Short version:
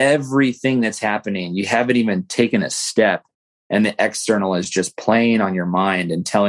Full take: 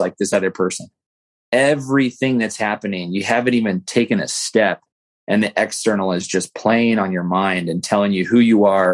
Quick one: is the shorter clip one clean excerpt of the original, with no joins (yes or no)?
yes